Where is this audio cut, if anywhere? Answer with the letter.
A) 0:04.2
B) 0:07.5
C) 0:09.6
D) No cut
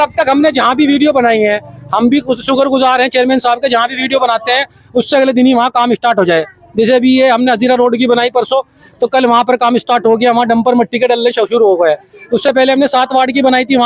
D